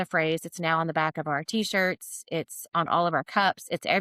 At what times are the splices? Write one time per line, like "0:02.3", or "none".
none